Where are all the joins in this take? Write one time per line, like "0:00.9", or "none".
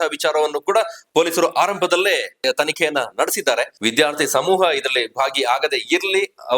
0:02.4
0:03.7